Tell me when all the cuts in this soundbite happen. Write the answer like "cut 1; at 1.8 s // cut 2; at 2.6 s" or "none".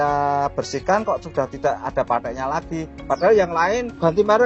none